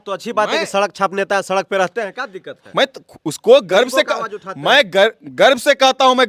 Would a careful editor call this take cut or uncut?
uncut